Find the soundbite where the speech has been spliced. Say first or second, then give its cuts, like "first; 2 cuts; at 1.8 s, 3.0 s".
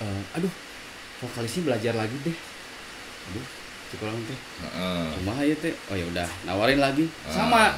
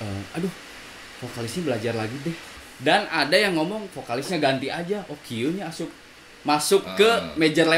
second; 1 cut; at 2.6 s